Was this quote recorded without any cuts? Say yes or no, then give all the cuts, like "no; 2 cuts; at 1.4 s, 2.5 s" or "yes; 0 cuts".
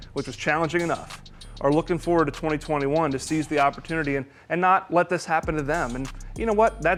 yes; 0 cuts